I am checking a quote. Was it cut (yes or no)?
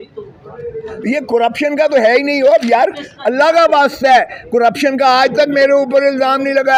no